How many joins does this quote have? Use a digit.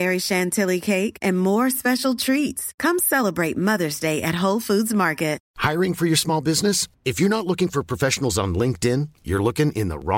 1